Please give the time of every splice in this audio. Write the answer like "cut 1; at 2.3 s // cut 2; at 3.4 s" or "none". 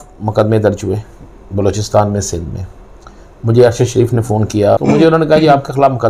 cut 1; at 4.8 s